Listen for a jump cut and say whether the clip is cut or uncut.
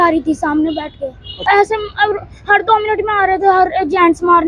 cut